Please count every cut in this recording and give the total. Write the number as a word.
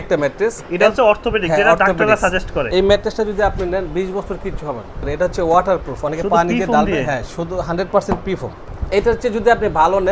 three